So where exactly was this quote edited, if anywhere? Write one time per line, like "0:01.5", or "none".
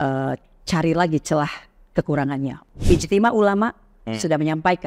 0:02.6